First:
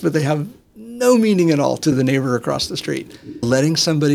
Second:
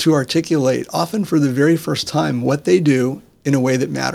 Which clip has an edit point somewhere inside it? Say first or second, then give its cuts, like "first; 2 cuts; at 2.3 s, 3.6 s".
first; 2 cuts; at 1.9 s, 3.4 s